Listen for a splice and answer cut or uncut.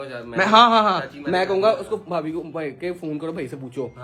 uncut